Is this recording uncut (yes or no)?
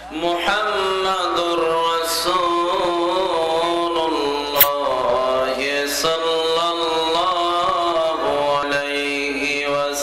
no